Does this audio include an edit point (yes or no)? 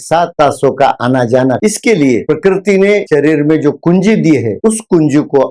yes